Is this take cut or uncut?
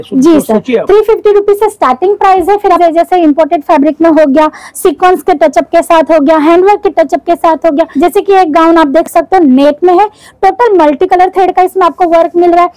cut